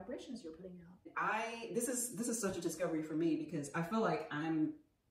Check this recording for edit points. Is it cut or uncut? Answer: cut